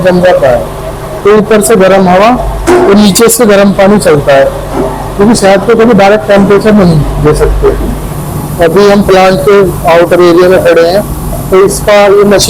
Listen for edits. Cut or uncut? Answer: cut